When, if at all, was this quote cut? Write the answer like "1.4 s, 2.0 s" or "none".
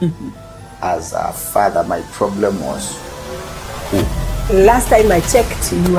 4.4 s